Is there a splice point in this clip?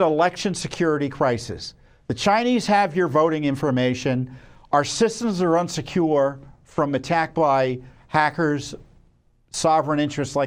no; 0 cuts

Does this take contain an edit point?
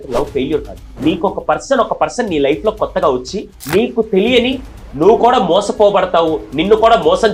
no; 0 cuts

